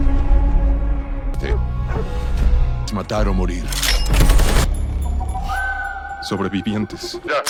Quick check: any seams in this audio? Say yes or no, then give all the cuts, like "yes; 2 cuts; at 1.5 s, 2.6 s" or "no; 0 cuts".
no; 0 cuts